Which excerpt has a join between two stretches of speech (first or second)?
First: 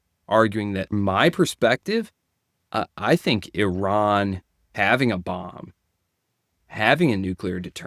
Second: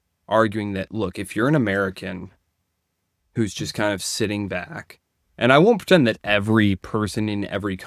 first